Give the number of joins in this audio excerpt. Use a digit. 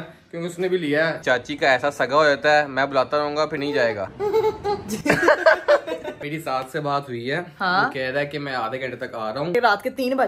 4